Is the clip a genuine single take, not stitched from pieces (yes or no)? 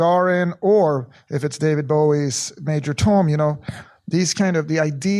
yes